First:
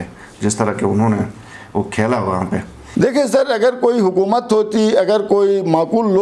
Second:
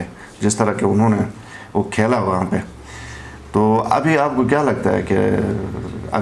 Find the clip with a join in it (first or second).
first